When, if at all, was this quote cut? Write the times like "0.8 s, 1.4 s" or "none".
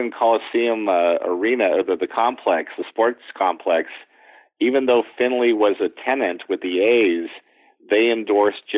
none